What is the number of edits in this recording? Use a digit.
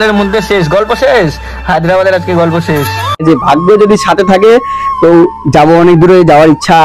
1